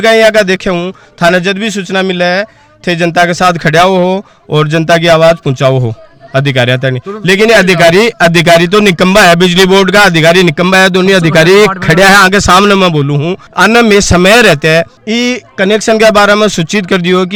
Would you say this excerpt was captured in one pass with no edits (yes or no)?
yes